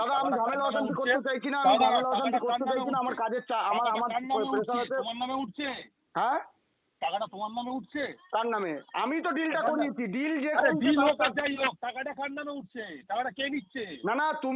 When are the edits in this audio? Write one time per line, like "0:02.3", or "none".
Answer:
none